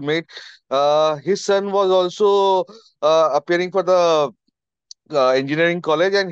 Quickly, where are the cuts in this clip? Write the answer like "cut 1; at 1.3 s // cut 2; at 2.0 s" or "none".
none